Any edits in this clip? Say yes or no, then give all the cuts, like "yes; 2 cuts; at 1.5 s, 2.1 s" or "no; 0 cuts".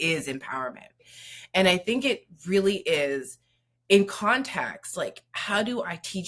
yes; 1 cut; at 1.0 s